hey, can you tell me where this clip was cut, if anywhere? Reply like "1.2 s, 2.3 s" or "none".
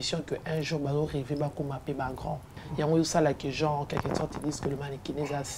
2.6 s